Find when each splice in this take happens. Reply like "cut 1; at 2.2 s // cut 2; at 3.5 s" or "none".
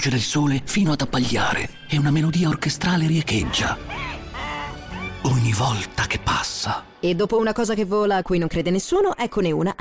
cut 1; at 5.1 s // cut 2; at 6.9 s